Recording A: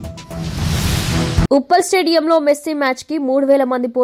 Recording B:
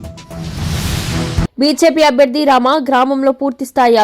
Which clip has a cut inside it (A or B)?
B